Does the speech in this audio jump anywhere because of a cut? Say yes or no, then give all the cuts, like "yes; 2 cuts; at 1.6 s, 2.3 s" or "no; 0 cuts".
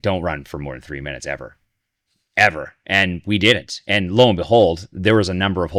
no; 0 cuts